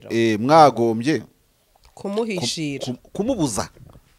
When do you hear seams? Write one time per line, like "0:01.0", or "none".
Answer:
none